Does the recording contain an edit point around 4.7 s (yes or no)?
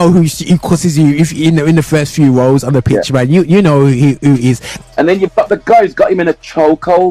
yes